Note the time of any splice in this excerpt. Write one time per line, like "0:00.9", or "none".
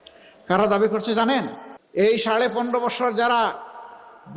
0:01.9